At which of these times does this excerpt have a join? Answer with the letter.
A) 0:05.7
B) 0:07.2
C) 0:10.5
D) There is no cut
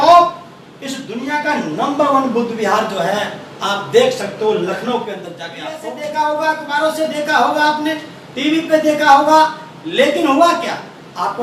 A